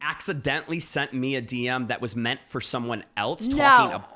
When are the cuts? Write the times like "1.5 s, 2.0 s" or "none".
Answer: none